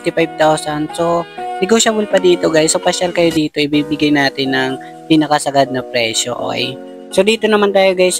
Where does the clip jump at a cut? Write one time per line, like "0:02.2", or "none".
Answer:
0:07.1